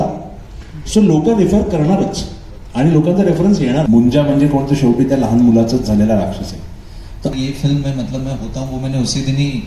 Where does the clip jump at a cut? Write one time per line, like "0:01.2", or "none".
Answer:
0:03.8
0:07.3